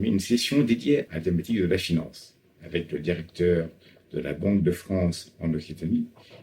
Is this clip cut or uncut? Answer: cut